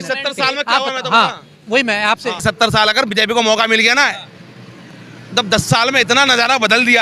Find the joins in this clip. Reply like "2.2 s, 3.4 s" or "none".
2.4 s